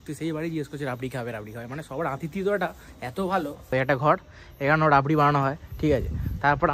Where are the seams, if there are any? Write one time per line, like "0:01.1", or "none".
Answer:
0:03.7